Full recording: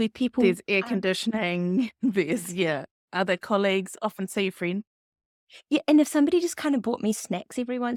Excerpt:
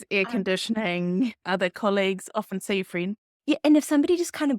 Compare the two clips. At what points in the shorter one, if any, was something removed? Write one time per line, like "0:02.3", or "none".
0:01.4
0:03.3